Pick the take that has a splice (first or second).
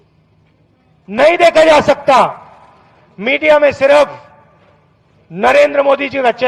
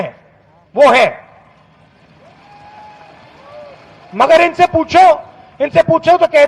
second